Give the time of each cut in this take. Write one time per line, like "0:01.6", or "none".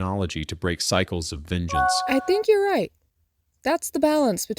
0:01.7